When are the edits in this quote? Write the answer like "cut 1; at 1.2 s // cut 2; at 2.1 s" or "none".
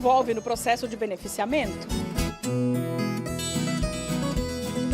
cut 1; at 1.7 s

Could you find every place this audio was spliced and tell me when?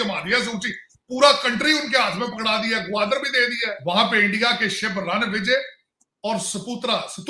cut 1; at 3.7 s

